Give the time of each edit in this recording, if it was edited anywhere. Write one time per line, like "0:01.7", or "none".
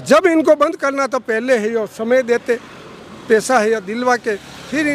none